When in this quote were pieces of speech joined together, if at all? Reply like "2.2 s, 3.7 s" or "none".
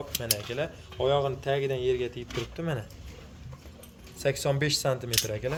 none